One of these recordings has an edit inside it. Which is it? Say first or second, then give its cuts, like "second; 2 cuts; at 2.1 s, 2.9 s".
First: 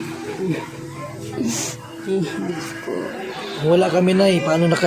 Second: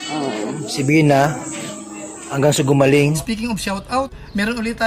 second; 1 cut; at 3.2 s